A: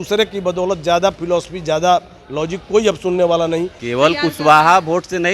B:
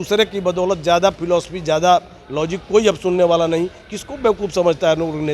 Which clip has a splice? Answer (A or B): A